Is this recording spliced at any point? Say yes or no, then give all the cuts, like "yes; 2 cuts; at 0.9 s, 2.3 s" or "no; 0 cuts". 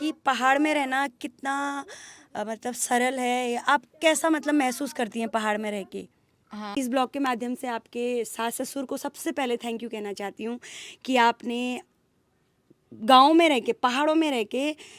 yes; 1 cut; at 6.6 s